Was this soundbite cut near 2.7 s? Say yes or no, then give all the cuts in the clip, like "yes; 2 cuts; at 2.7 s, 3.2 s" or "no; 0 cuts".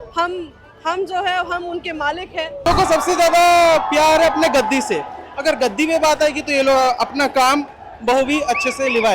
yes; 1 cut; at 2.7 s